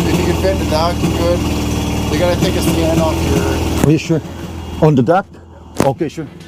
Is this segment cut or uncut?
uncut